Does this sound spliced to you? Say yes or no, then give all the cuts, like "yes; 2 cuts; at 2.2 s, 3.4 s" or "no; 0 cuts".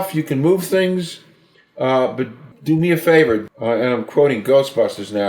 yes; 2 cuts; at 2.5 s, 3.5 s